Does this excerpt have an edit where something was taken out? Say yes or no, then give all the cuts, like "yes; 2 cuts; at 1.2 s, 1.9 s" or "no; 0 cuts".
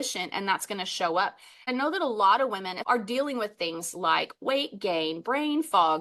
yes; 2 cuts; at 1.7 s, 2.7 s